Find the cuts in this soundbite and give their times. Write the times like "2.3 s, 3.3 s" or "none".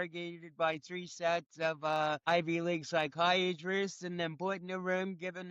2.2 s